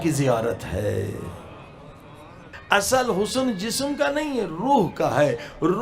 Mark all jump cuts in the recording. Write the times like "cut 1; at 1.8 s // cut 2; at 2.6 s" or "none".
cut 1; at 2.5 s